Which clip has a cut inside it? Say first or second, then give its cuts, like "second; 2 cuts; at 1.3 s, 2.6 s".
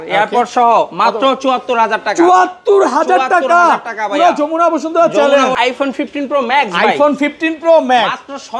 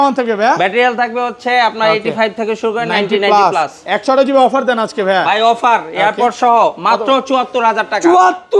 first; 1 cut; at 5.5 s